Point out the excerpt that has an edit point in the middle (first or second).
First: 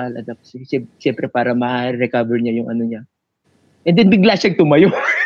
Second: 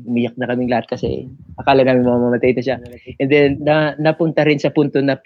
second